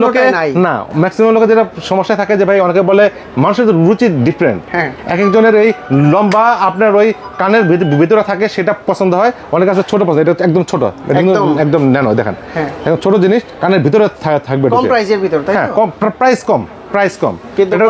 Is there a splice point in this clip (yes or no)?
no